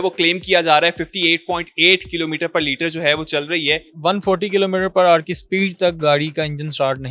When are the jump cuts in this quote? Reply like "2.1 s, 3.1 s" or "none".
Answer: 3.9 s